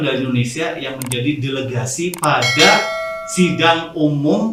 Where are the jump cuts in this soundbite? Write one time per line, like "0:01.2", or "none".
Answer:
none